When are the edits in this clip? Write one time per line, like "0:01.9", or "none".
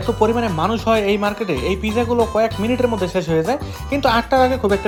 none